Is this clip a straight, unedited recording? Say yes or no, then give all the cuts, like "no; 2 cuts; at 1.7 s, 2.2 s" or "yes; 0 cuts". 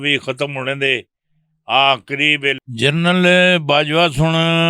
no; 1 cut; at 2.6 s